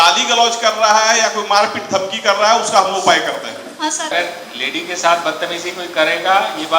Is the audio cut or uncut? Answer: cut